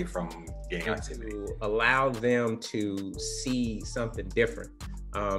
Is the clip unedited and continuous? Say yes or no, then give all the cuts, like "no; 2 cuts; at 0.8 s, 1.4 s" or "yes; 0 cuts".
no; 1 cut; at 1.5 s